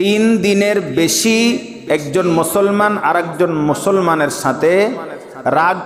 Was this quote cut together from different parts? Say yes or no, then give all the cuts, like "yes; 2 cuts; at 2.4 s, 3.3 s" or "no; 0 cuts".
no; 0 cuts